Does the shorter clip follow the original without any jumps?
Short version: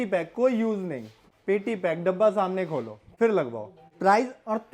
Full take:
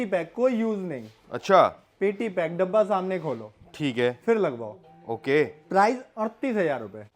no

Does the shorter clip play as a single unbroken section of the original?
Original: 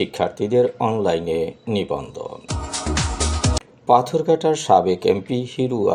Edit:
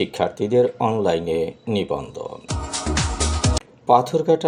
yes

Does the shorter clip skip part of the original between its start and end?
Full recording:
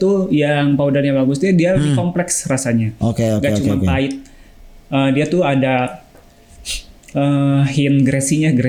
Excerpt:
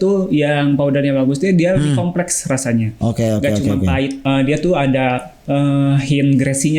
yes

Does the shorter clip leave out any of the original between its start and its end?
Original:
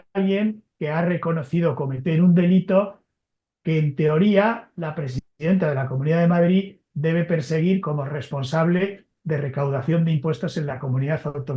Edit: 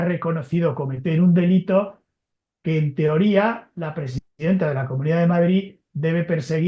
no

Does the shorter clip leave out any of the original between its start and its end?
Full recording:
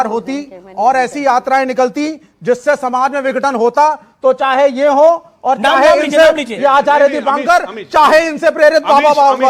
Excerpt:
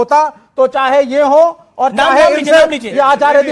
no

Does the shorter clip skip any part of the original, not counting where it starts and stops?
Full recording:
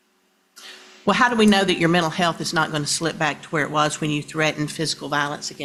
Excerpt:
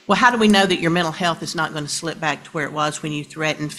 no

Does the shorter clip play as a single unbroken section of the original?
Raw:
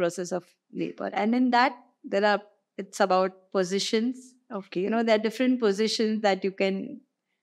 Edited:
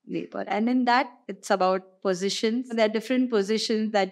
no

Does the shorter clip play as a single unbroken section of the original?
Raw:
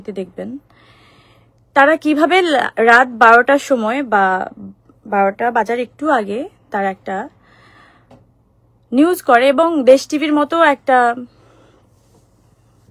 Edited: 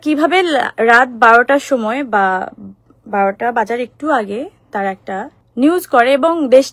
no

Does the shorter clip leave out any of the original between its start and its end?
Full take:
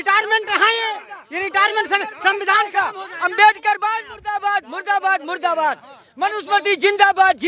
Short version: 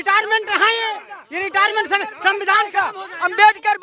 no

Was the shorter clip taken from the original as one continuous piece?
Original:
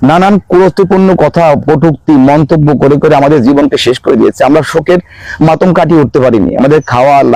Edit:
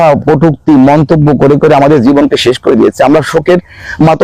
yes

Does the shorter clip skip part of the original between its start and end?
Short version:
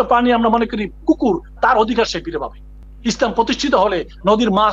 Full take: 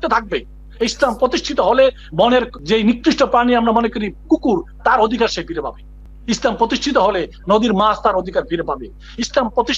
no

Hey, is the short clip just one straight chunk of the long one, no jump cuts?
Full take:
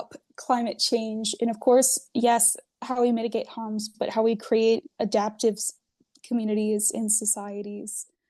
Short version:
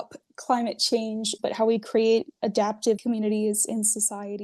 no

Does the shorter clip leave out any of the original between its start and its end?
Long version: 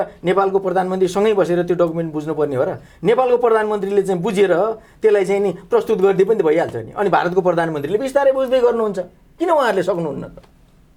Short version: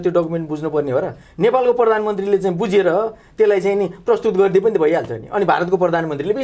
no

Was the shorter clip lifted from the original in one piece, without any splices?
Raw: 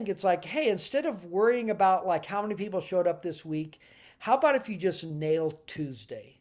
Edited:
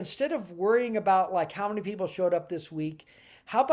yes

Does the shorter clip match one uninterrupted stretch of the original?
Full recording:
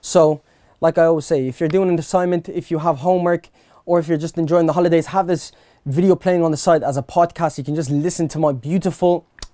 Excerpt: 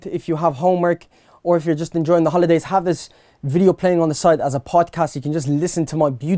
yes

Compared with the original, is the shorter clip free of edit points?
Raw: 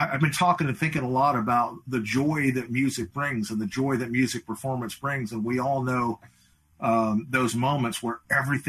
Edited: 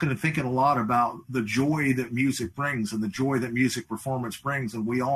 yes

